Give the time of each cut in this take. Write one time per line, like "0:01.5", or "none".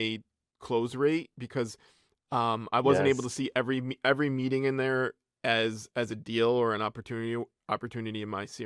none